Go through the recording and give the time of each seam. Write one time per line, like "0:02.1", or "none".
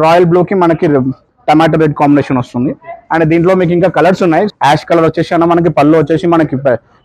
0:04.5